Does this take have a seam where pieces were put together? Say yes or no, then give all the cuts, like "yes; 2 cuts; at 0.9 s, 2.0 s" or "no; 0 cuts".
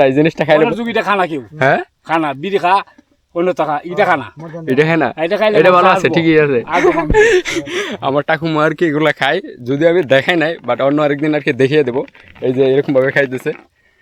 no; 0 cuts